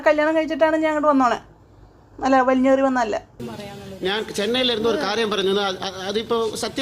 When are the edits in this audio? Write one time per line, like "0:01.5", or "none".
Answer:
0:03.4